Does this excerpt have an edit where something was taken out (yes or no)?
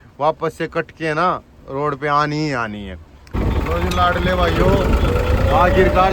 yes